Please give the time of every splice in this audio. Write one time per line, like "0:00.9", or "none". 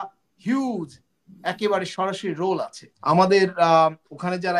0:02.9